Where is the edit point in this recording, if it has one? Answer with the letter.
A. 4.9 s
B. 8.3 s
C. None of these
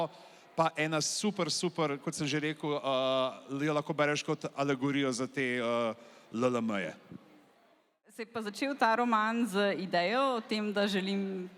B